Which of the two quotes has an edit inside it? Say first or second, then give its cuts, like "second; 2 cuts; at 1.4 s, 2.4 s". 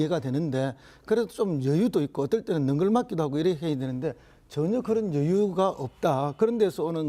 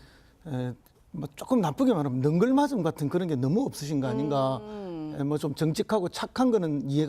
second; 1 cut; at 5.7 s